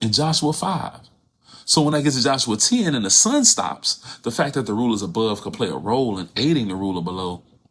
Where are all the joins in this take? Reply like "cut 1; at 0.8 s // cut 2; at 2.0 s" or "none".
none